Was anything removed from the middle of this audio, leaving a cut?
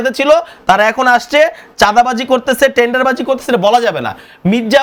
no; 0 cuts

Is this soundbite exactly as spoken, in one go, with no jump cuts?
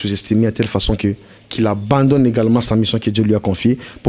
yes; 0 cuts

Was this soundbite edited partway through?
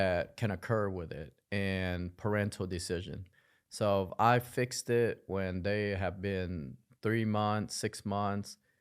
no; 0 cuts

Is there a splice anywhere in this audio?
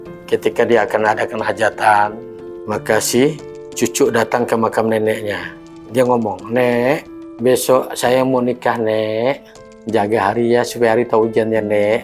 no; 0 cuts

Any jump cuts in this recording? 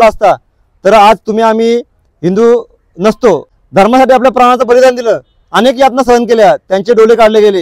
yes; 1 cut; at 3.5 s

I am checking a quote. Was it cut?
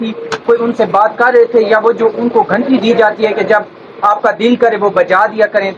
no; 0 cuts

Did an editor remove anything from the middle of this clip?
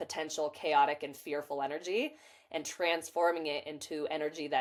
no; 0 cuts

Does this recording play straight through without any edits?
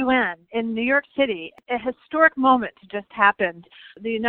no; 1 cut; at 1.6 s

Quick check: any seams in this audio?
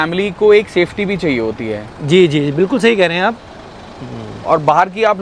no; 0 cuts

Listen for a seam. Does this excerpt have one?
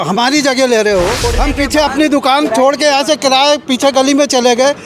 yes; 1 cut; at 1.3 s

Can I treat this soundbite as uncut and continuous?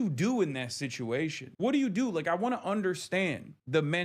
no; 1 cut; at 1.4 s

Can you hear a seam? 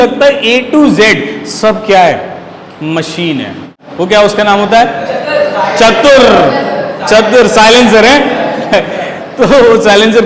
yes; 1 cut; at 3.8 s

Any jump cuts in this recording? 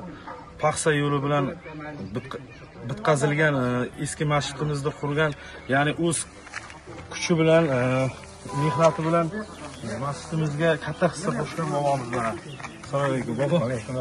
no; 0 cuts

